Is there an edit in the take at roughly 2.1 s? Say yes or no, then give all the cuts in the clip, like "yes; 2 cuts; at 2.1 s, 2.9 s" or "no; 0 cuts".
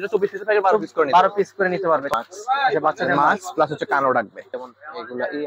yes; 2 cuts; at 2.1 s, 4.5 s